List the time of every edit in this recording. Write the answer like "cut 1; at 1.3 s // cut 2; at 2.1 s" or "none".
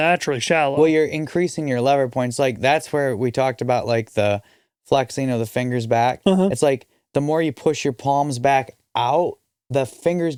none